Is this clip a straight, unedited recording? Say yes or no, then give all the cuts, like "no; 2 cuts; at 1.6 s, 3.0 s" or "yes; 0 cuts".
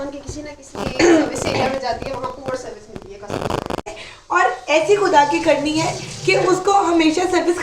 no; 1 cut; at 3.9 s